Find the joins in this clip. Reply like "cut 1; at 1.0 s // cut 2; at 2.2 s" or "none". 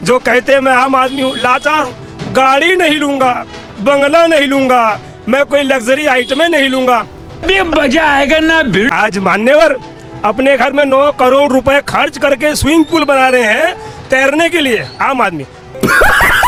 none